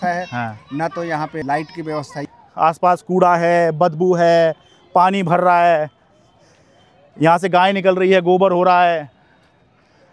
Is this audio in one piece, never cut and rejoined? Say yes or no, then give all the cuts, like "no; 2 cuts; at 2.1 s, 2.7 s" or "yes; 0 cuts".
no; 2 cuts; at 1.4 s, 2.3 s